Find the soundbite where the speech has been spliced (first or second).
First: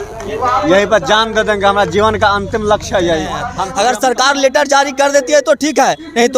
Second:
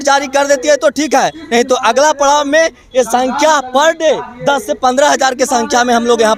first